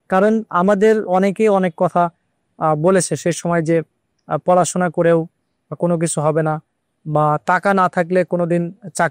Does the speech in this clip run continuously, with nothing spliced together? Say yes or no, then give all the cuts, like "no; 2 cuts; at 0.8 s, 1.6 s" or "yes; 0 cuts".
no; 1 cut; at 1.1 s